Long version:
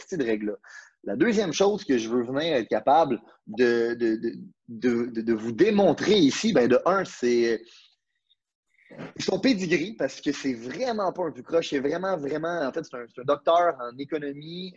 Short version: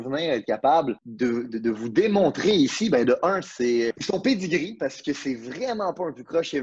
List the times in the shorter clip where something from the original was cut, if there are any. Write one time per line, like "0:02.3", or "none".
0:01.0
0:04.0